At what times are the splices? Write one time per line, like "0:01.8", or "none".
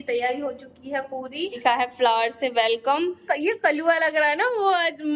0:01.6
0:03.2